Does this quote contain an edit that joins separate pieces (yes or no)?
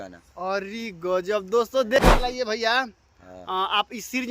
yes